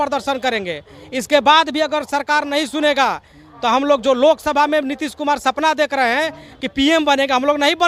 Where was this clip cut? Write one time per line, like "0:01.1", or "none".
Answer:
none